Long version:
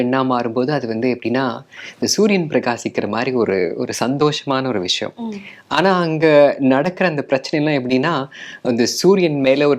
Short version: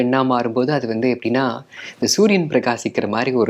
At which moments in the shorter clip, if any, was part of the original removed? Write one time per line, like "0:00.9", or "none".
none